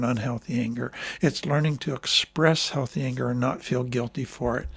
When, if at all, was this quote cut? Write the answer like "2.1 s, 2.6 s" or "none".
none